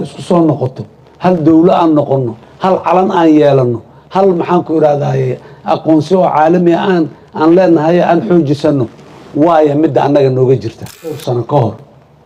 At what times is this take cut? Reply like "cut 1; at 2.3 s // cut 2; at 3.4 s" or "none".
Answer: cut 1; at 11.2 s